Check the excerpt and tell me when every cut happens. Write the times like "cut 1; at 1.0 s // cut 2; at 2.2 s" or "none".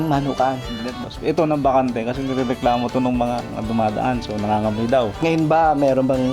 cut 1; at 3.5 s // cut 2; at 5.2 s

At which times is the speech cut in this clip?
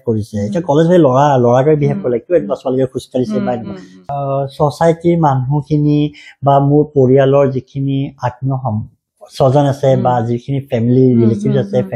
cut 1; at 4.0 s

